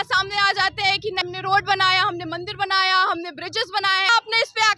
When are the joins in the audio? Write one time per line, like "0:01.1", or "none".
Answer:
0:01.2
0:04.1

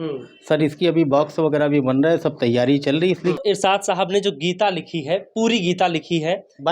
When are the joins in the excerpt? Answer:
0:03.4

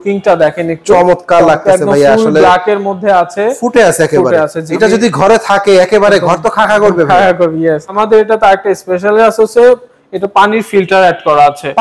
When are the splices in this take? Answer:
0:04.6
0:08.0

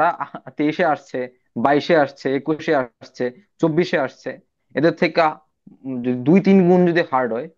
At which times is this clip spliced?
none

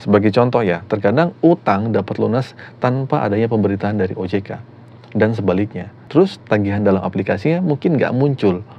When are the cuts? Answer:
none

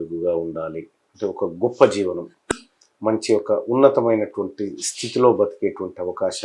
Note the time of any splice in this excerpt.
0:02.5

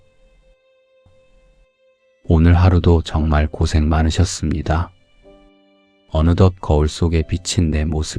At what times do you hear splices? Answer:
0:02.1

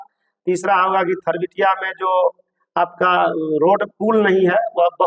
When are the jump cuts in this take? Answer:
none

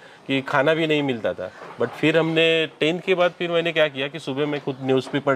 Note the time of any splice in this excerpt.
none

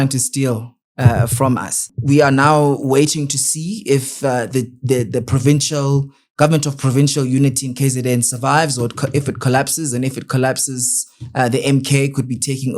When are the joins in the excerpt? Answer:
0:01.8

